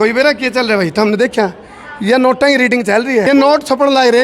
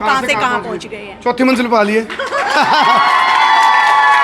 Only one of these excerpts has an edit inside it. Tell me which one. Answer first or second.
first